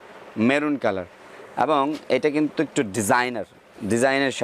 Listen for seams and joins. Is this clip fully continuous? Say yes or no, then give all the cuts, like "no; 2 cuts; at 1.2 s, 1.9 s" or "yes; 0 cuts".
no; 1 cut; at 1.2 s